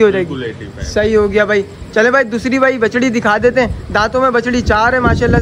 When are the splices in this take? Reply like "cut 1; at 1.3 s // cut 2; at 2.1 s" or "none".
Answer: none